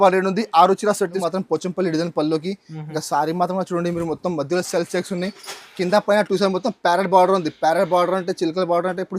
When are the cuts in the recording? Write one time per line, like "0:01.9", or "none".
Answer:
0:01.2